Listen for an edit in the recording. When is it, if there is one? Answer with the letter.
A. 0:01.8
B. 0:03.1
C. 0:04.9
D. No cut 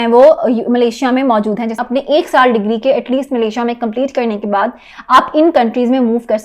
A